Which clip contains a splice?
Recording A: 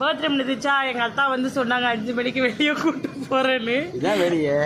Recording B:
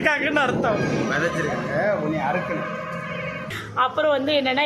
B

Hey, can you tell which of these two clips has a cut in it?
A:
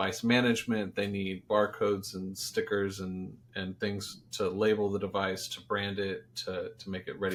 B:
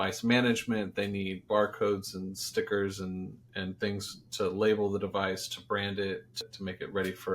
B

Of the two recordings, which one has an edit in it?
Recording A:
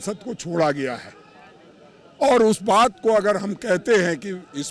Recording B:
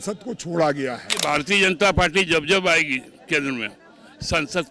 B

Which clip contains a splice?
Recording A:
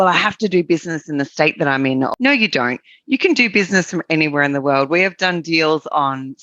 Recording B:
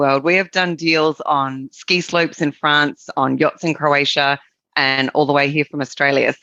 A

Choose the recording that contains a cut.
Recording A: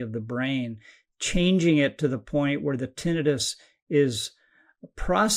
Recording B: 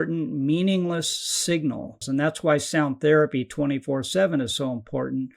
B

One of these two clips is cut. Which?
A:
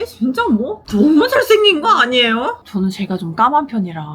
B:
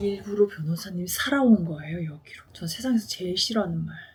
A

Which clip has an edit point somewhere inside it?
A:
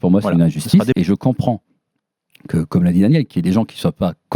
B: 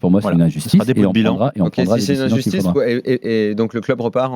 A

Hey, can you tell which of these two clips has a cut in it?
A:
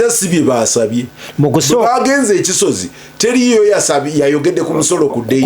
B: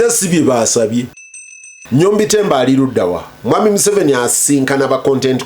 B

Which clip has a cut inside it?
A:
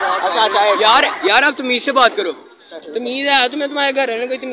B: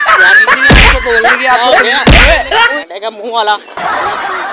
B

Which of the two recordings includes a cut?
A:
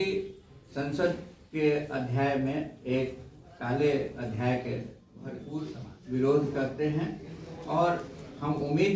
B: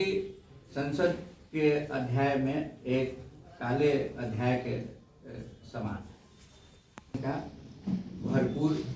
A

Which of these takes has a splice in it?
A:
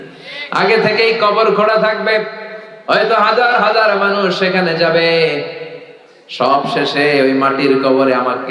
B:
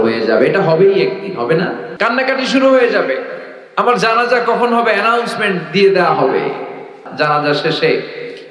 B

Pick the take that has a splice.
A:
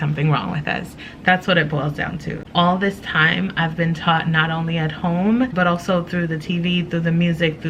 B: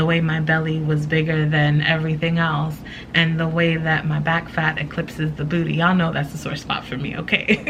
A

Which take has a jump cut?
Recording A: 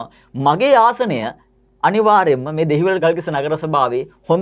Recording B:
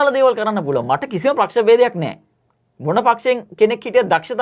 A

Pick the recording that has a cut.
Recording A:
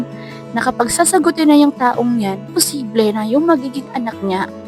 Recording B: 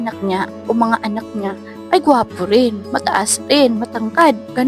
A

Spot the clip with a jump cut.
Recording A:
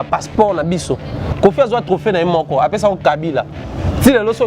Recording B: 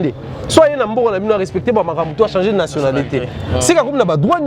A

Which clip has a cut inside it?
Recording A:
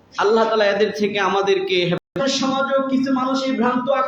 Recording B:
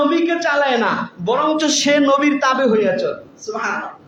A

